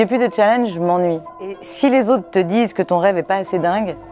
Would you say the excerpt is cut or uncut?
cut